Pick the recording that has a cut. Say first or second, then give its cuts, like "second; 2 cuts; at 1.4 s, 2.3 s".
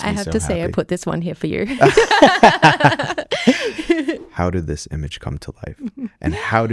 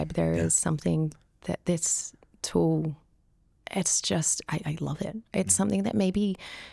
first; 1 cut; at 4.2 s